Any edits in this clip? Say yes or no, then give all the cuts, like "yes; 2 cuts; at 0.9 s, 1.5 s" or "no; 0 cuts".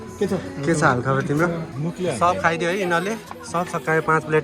yes; 1 cut; at 1.7 s